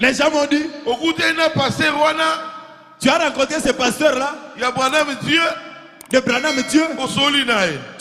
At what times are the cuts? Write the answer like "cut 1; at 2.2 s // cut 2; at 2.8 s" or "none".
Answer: none